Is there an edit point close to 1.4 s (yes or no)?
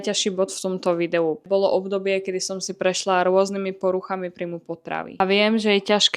yes